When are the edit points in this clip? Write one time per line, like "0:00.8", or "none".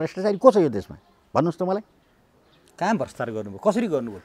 none